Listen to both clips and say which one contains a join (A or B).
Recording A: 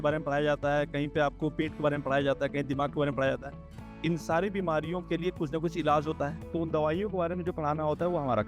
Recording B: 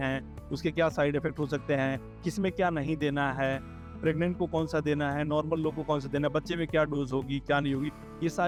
A